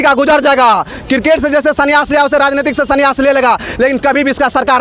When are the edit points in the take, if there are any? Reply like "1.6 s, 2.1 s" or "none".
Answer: none